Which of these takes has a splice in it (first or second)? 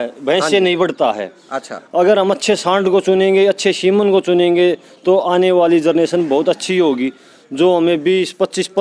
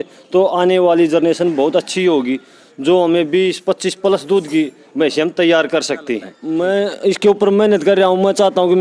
second